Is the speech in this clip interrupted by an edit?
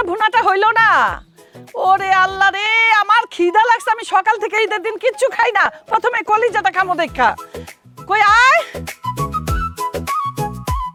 no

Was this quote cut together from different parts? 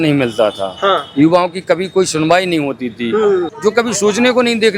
yes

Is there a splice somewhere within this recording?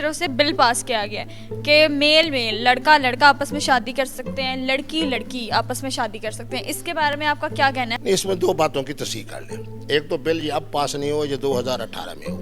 no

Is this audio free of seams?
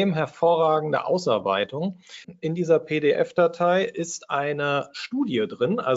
no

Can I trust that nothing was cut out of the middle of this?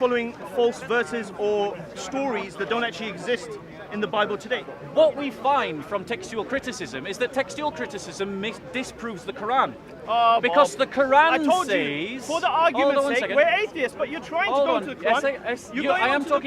no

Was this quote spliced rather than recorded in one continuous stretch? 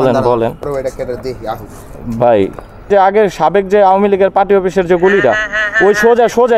yes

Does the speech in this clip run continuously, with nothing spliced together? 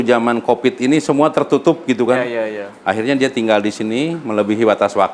yes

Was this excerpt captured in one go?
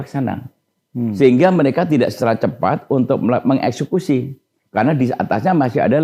yes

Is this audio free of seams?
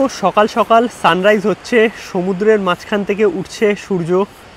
yes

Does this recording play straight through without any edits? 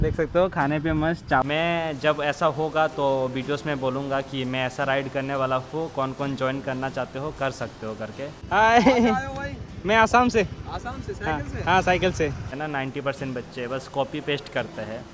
no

